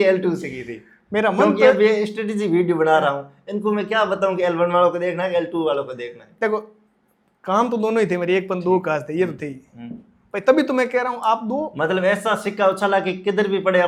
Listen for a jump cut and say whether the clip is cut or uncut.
uncut